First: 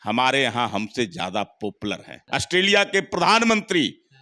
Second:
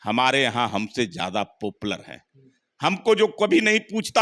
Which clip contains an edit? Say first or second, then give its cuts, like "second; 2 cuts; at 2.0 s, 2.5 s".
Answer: first; 1 cut; at 2.1 s